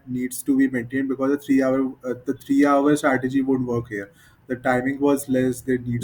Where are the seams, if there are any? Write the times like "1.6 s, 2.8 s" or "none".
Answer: none